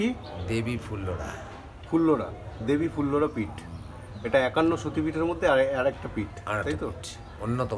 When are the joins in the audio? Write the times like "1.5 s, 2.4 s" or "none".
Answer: none